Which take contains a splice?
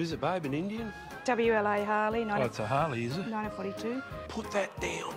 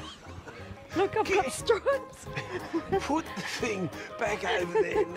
first; 1 cut; at 4.2 s

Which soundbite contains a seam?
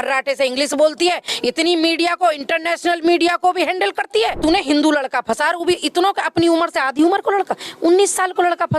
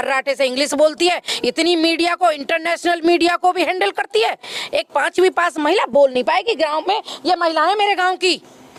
first; 1 cut; at 4.4 s

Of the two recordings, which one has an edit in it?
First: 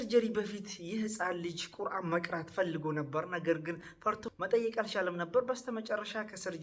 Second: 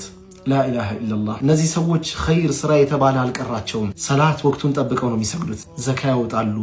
first; 1 cut; at 4.3 s

